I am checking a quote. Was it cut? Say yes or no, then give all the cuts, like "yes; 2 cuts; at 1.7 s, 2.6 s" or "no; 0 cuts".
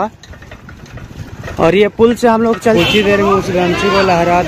yes; 1 cut; at 2.8 s